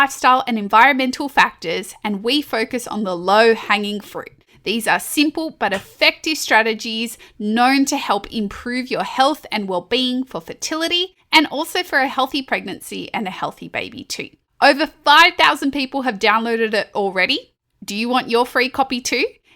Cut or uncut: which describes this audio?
uncut